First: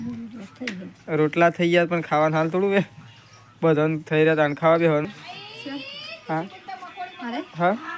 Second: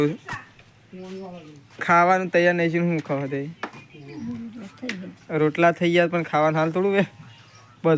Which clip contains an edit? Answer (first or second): first